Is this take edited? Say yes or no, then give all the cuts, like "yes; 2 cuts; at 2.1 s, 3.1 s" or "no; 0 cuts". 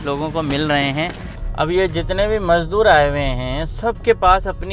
yes; 1 cut; at 1.3 s